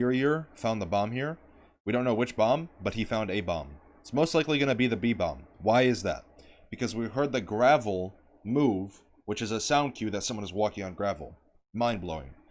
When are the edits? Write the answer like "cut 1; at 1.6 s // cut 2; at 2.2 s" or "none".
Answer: none